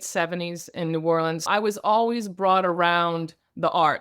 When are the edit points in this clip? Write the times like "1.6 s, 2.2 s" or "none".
1.4 s